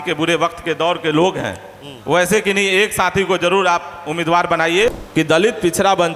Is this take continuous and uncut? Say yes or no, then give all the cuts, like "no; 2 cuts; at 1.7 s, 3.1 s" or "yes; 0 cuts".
no; 1 cut; at 4.9 s